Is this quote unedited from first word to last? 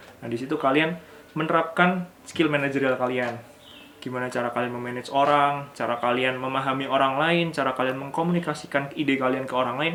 yes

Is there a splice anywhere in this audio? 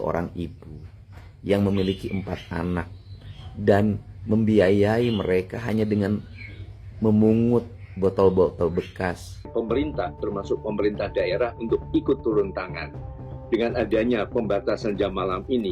yes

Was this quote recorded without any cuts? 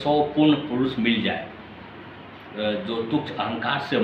yes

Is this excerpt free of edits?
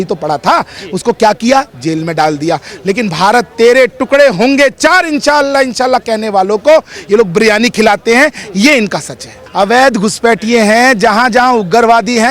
no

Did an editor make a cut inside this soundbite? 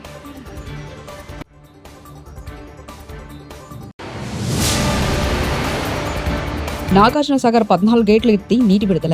no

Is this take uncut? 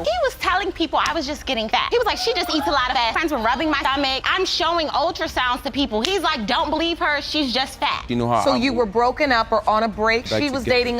no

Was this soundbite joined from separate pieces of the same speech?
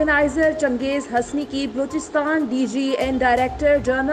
no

